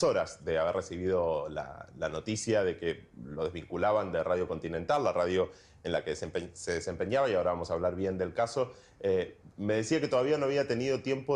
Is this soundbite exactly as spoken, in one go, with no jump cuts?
no; 1 cut; at 10.1 s

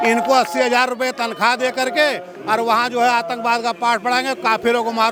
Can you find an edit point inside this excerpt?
no; 0 cuts

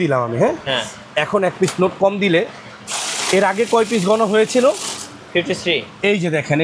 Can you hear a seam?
no; 0 cuts

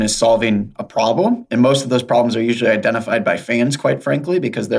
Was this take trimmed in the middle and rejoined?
no; 0 cuts

